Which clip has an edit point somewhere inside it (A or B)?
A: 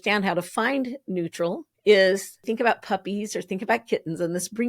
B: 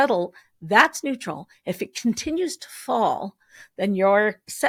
A